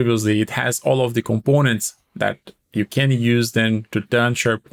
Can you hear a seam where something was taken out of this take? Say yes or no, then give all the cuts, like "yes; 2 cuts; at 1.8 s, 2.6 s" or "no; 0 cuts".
no; 0 cuts